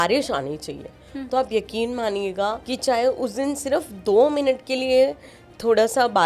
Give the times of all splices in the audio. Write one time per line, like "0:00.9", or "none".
0:02.7